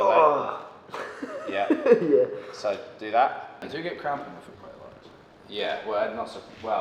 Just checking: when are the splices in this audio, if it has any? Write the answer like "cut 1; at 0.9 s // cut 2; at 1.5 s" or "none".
cut 1; at 3.6 s